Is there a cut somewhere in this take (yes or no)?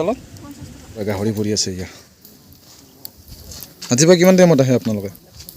yes